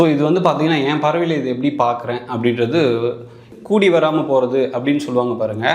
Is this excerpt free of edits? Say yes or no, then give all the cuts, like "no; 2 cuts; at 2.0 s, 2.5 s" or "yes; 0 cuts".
no; 1 cut; at 3.4 s